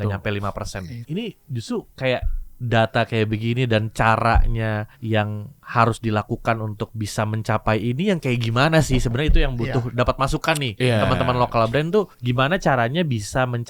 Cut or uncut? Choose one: cut